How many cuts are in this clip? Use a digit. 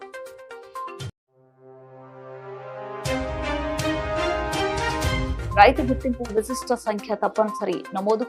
1